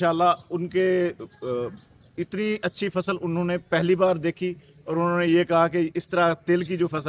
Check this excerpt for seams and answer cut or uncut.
uncut